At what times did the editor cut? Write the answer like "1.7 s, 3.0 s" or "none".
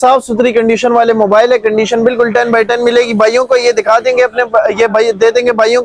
none